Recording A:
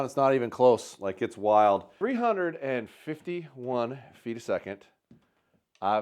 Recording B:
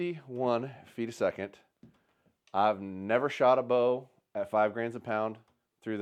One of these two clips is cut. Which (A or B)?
A